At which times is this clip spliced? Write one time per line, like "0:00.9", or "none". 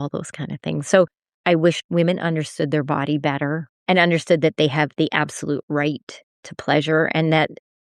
0:01.5
0:03.7